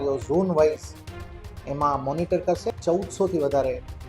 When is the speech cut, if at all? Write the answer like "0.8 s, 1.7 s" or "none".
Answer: 2.7 s